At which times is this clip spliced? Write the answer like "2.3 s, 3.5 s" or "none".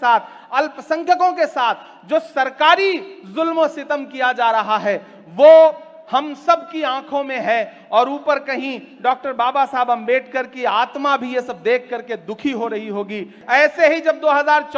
13.4 s